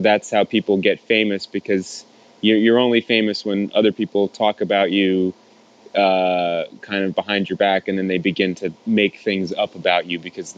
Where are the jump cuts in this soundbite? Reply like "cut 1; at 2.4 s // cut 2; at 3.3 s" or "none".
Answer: none